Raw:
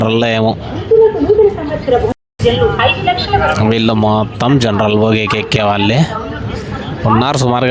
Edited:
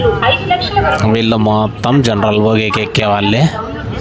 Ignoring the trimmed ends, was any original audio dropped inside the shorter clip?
no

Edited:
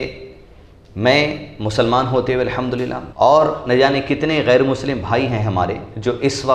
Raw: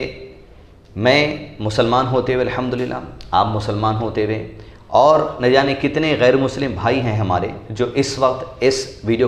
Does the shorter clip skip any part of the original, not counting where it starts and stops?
yes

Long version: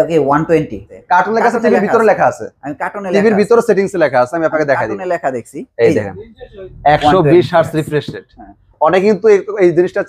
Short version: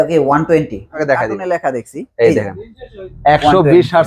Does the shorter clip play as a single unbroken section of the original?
no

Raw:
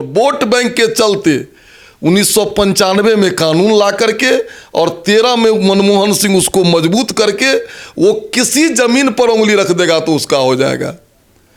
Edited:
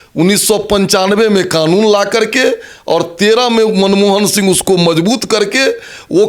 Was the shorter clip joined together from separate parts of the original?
no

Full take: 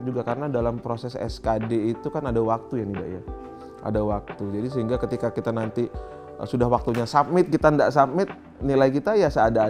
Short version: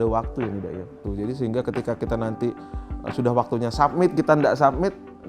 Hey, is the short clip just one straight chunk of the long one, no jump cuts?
no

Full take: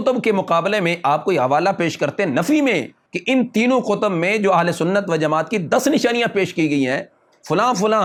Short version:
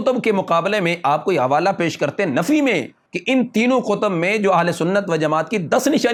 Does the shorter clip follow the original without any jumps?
yes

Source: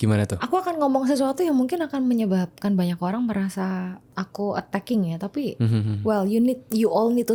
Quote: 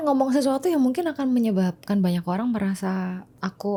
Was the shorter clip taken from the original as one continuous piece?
yes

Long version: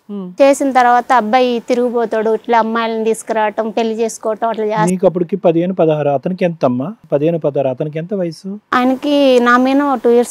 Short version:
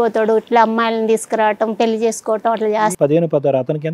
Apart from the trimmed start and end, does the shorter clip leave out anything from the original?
yes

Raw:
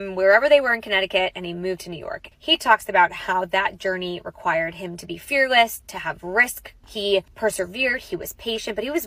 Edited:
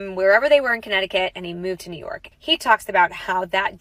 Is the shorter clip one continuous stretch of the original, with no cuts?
yes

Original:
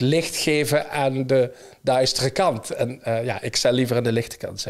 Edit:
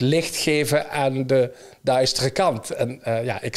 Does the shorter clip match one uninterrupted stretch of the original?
yes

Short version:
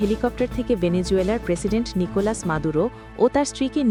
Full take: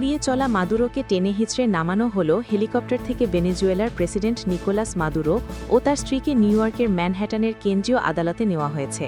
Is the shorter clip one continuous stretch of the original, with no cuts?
yes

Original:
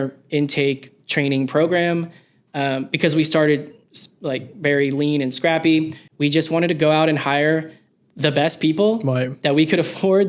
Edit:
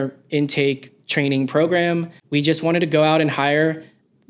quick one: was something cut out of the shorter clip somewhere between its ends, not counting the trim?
yes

